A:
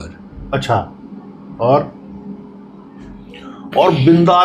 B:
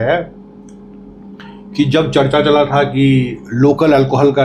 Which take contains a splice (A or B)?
A